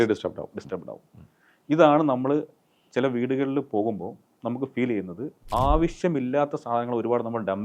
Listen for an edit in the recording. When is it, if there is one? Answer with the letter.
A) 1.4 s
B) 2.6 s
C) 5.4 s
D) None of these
C